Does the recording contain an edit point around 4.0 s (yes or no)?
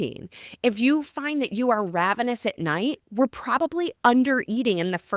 no